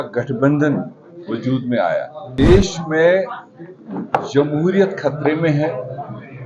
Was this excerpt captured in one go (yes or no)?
no